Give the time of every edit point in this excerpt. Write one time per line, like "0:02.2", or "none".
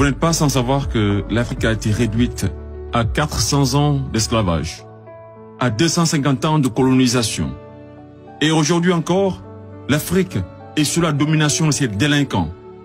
0:01.5